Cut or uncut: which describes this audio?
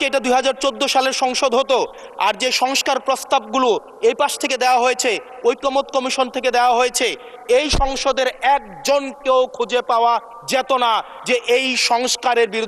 uncut